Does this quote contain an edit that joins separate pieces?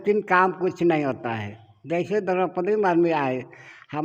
no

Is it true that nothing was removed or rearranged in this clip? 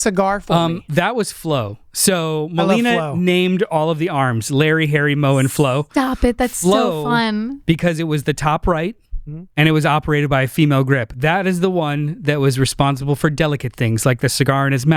yes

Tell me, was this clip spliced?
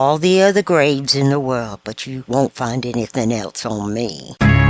no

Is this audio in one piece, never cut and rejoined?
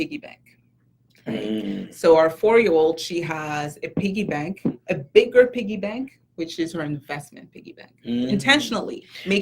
yes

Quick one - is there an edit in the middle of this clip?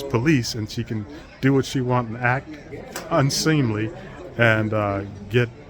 no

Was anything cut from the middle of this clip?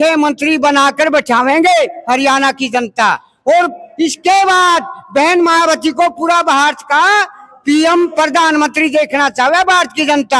no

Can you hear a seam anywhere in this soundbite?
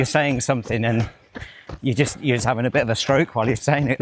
no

